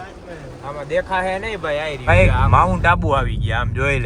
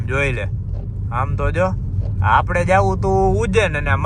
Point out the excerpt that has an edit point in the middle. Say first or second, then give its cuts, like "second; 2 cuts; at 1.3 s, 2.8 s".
first; 1 cut; at 2.0 s